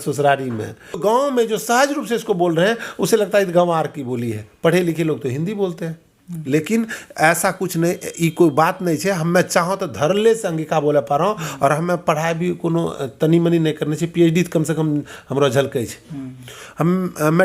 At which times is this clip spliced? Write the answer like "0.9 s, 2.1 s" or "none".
1.0 s